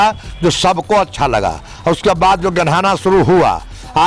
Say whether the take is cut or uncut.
uncut